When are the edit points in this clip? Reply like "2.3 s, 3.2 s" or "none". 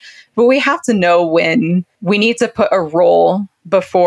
1.9 s